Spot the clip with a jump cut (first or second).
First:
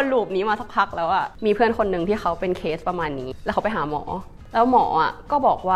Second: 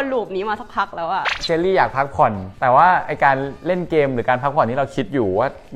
first